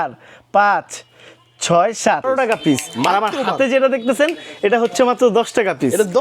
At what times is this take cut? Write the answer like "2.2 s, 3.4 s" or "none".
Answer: 2.3 s